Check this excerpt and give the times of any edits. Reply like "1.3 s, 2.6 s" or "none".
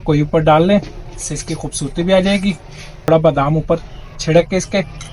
3.1 s